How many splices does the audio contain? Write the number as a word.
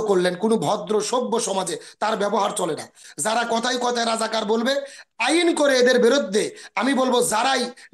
one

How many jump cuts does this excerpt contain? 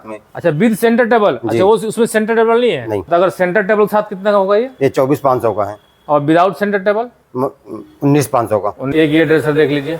two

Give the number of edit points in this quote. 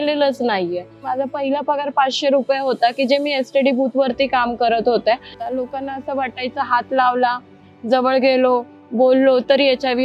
two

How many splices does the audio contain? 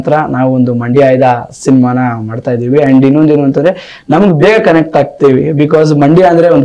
zero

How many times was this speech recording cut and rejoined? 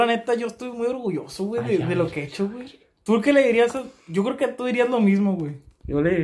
zero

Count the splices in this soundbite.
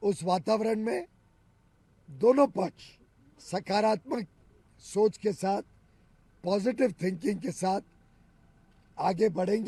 zero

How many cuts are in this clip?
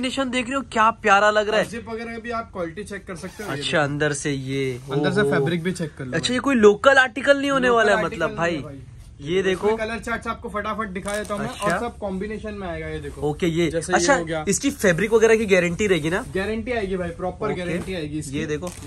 zero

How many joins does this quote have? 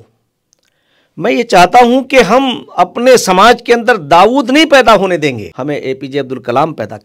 one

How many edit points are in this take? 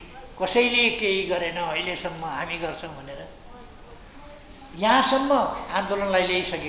zero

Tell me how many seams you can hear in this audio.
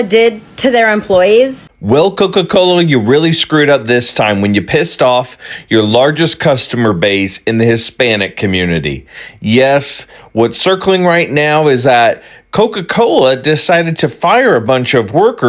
one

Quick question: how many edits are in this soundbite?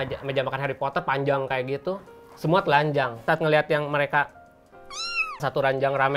one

